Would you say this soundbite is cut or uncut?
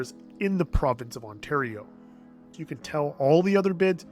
cut